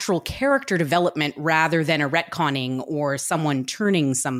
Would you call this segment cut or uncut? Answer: uncut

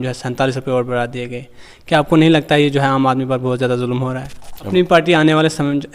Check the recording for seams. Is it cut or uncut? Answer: cut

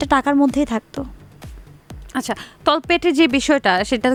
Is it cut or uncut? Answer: uncut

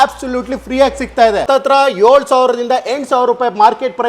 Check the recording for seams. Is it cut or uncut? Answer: cut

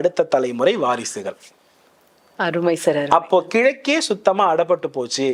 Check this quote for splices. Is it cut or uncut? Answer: uncut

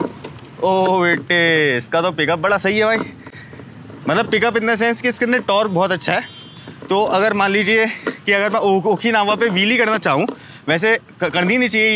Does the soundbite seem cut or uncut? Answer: uncut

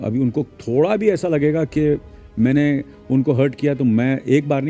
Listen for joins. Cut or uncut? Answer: uncut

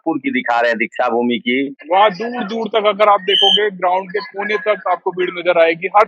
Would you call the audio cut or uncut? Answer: cut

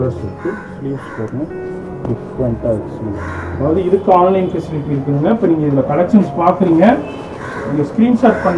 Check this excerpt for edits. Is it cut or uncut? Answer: cut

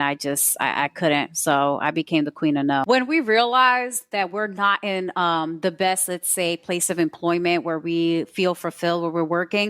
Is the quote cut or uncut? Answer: cut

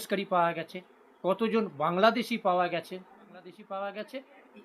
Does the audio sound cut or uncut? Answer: cut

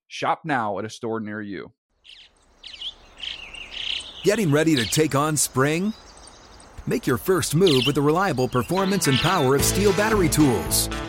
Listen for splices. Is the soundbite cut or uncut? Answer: cut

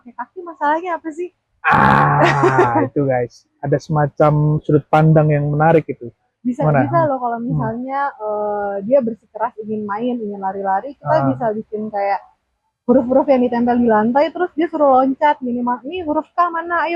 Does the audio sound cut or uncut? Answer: uncut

